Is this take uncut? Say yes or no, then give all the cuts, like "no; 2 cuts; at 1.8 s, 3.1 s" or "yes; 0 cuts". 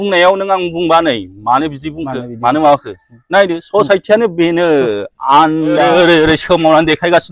no; 1 cut; at 5.8 s